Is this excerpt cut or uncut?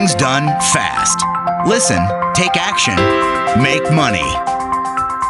uncut